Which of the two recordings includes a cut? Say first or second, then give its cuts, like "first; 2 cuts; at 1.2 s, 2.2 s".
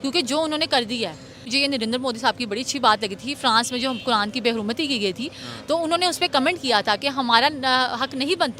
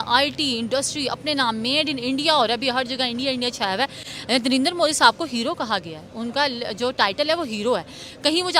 first; 1 cut; at 1.5 s